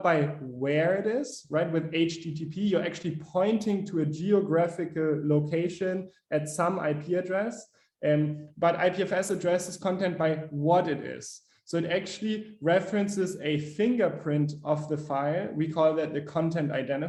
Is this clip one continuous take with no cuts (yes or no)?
yes